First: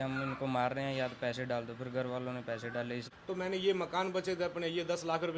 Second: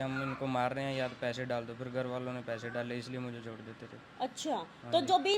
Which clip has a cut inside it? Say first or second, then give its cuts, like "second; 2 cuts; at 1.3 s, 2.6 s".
first; 1 cut; at 3.1 s